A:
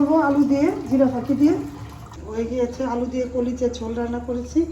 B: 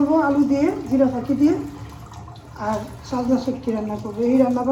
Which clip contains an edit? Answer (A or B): A